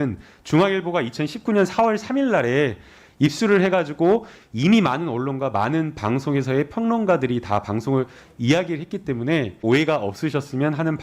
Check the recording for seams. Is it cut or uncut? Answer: cut